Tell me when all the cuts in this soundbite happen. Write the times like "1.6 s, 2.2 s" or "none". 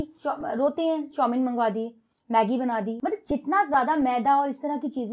2.9 s